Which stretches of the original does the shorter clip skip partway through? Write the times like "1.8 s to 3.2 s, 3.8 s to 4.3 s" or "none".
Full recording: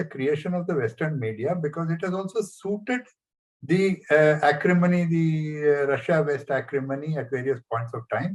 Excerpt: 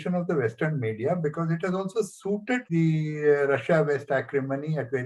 3.1 s to 5.1 s